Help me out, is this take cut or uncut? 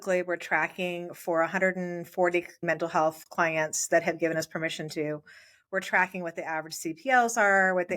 cut